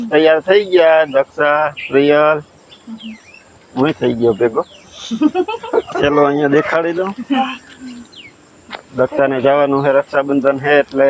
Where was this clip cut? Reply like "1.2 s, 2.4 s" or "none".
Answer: none